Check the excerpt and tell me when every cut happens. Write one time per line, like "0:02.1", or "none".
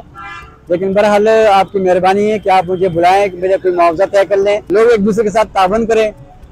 0:04.6